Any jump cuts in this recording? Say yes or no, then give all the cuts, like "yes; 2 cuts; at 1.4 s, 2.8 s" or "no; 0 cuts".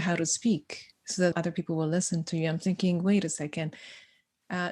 yes; 1 cut; at 1.3 s